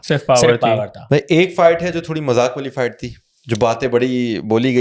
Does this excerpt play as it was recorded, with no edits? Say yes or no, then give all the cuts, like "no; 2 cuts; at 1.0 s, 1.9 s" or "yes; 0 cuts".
no; 1 cut; at 0.9 s